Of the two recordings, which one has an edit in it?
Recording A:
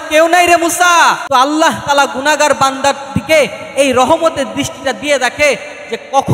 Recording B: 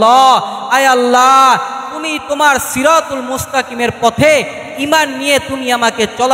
A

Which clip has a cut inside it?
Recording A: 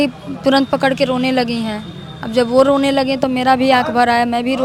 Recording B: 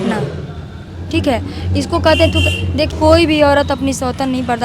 B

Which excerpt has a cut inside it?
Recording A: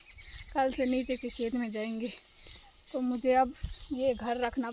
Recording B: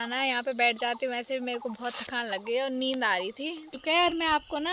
B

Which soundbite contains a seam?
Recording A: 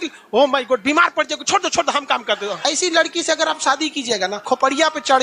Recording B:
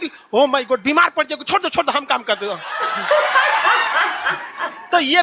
A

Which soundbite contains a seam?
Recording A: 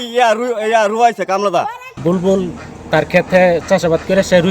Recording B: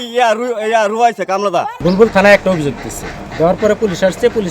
B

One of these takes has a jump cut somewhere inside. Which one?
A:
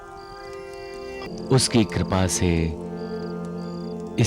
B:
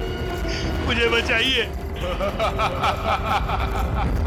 A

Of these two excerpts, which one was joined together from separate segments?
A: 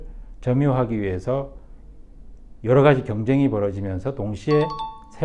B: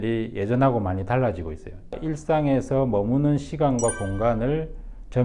B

